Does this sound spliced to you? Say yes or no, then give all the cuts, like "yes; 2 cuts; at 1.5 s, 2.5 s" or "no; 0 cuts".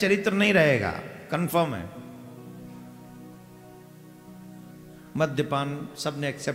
no; 0 cuts